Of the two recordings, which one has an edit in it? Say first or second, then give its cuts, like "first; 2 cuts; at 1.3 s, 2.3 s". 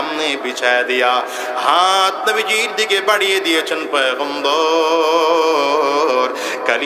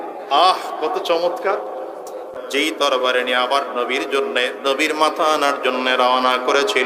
second; 1 cut; at 2.3 s